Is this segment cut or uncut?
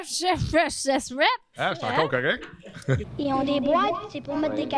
cut